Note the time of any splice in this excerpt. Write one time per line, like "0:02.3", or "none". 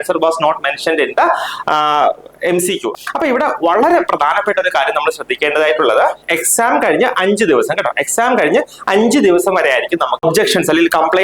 0:02.9
0:10.2